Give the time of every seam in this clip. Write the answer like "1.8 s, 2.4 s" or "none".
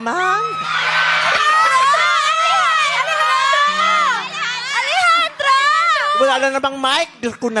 1.9 s, 3.1 s, 4.3 s